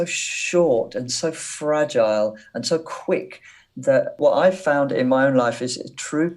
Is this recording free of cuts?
no; 1 cut; at 4.2 s

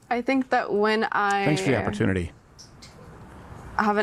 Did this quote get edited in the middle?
no; 0 cuts

